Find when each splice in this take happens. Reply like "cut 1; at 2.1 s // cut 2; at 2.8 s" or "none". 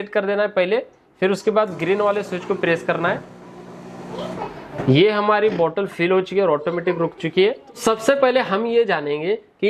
cut 1; at 7.7 s